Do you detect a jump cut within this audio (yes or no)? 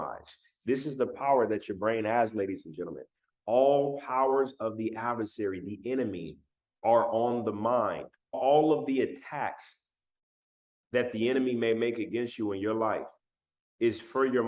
yes